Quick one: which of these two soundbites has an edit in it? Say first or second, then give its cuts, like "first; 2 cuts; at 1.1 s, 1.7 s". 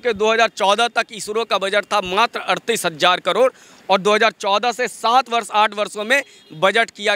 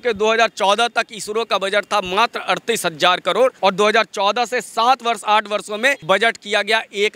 second; 2 cuts; at 3.6 s, 6.0 s